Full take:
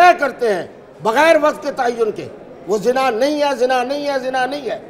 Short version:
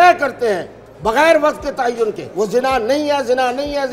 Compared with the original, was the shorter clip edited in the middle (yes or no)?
yes